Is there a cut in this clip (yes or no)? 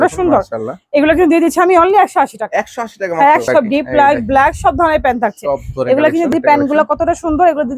yes